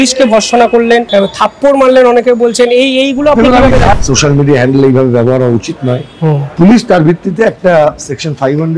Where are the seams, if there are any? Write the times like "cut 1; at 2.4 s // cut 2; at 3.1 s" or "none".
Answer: cut 1; at 1.1 s // cut 2; at 3.9 s // cut 3; at 6.5 s